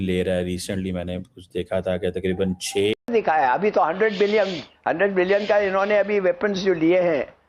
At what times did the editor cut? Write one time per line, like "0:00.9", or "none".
0:03.1